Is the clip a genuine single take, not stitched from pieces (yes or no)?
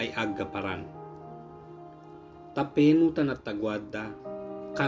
no